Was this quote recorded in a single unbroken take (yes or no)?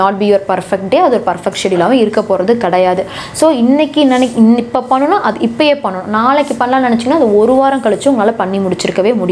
yes